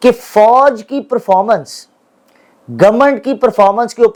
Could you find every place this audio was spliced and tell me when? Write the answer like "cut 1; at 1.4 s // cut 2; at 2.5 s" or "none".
none